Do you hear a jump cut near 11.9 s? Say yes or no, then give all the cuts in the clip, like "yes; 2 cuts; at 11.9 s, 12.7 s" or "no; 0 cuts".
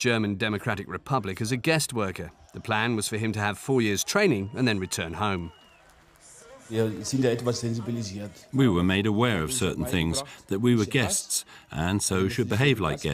no; 0 cuts